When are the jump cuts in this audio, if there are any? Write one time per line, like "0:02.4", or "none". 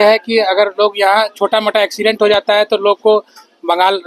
none